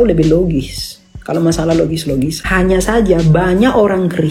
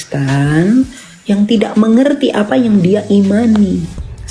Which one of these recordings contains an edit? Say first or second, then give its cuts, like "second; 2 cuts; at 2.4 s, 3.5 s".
first; 1 cut; at 2.4 s